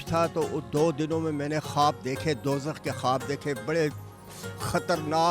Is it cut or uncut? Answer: uncut